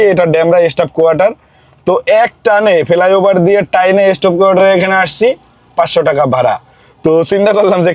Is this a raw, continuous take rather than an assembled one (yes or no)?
yes